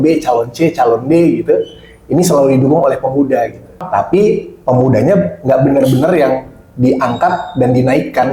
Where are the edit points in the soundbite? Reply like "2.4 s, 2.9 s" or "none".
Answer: none